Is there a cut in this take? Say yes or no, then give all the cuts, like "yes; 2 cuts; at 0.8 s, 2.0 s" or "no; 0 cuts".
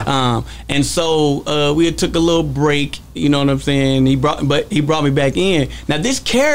no; 0 cuts